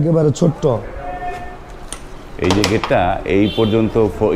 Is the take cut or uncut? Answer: uncut